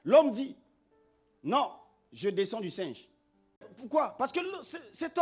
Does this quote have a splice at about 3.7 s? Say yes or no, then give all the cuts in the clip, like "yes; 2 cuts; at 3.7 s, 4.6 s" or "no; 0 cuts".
yes; 1 cut; at 3.7 s